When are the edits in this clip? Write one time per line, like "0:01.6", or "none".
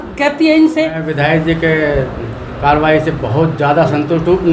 0:01.1